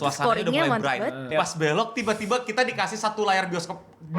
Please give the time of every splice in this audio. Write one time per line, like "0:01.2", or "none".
0:01.3